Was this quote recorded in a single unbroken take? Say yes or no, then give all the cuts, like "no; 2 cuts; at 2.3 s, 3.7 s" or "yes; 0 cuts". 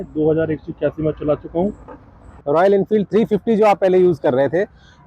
no; 1 cut; at 2.4 s